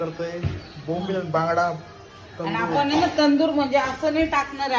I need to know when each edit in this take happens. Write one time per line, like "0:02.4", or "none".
none